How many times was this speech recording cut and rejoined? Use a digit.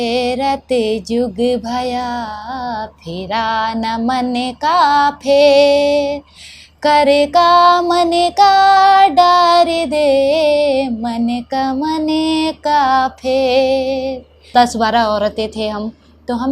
1